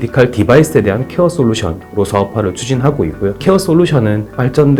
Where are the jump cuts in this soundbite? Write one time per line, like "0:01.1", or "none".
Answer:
none

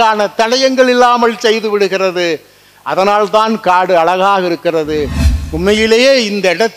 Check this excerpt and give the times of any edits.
0:05.2

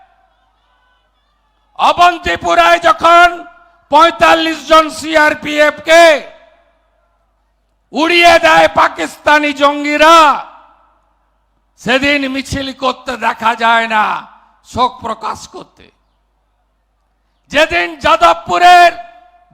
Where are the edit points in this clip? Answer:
none

